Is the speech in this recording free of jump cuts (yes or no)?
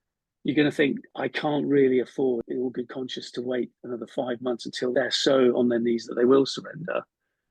no